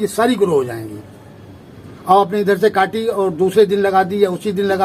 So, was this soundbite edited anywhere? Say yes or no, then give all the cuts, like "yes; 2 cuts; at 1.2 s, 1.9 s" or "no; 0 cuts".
no; 0 cuts